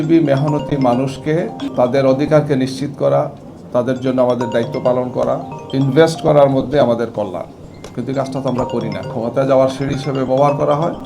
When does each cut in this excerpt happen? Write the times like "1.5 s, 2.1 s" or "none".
1.6 s, 5.5 s